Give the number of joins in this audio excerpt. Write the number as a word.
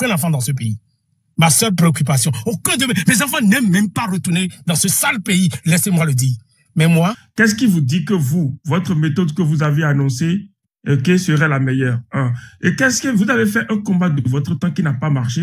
one